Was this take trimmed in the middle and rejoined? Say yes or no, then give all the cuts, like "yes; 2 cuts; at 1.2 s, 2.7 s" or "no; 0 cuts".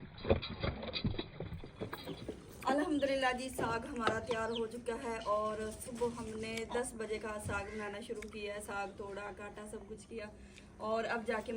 yes; 1 cut; at 1.9 s